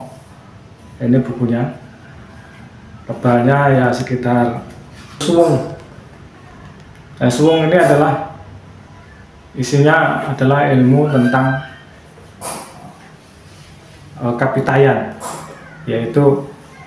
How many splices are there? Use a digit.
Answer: 1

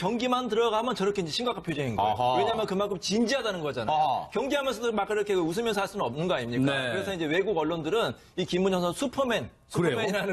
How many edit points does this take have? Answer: 0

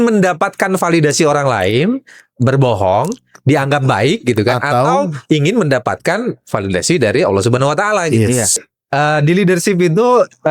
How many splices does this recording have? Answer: 1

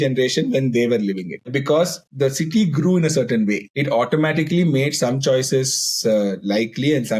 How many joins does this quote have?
3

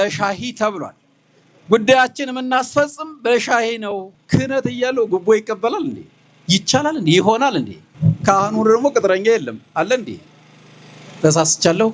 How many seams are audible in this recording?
2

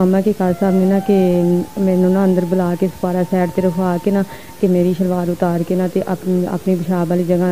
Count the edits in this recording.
0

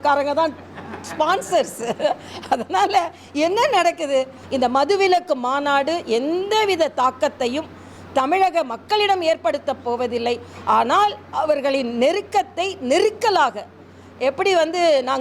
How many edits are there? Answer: 1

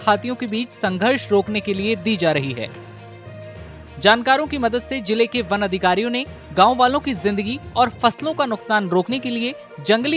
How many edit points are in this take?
2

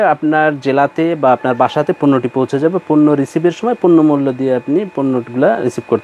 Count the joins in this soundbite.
0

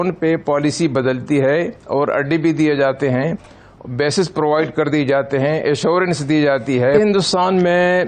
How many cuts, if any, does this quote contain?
1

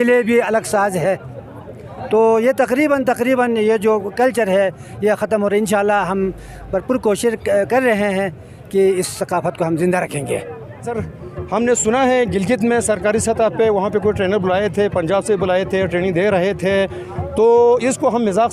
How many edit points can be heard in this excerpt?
1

